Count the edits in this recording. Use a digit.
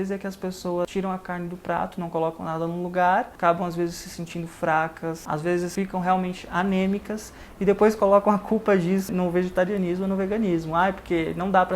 4